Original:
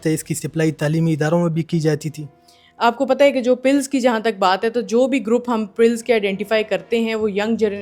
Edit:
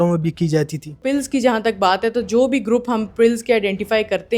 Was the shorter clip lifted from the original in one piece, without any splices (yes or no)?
no